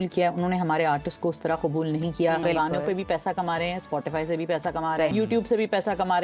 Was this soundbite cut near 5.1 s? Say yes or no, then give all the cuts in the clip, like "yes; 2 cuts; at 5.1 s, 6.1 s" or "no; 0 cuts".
yes; 2 cuts; at 2.4 s, 5.1 s